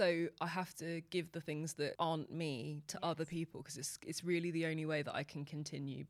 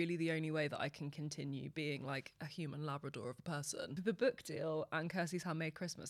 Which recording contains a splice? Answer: second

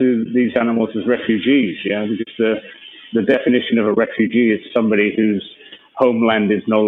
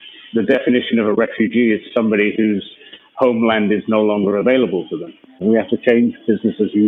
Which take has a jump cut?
second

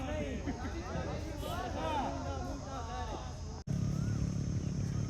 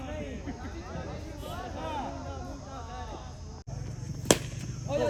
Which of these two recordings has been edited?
first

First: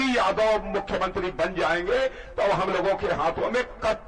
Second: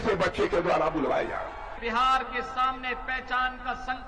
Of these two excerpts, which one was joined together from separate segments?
second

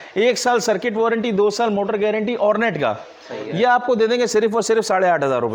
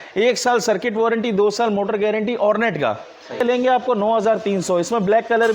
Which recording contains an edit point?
second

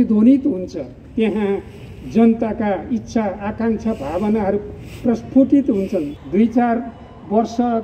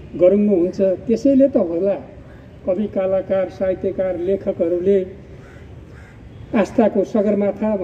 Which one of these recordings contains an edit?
first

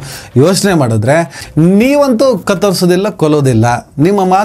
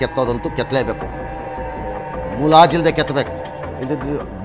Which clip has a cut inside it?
first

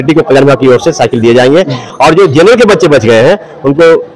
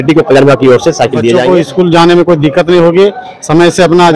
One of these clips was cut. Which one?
second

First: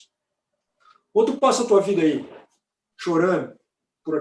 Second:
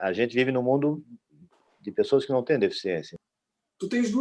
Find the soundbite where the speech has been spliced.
second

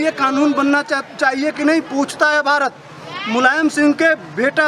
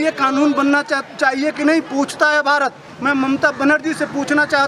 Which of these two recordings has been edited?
second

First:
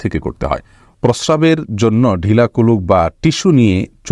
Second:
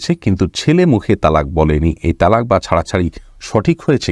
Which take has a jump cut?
first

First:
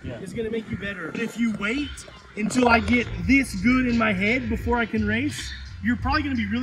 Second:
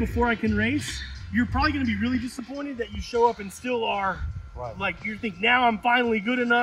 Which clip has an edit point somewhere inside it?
first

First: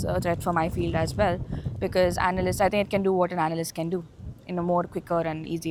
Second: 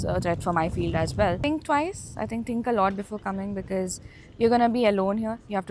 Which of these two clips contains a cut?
second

